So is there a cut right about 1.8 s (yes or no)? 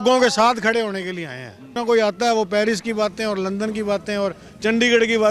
yes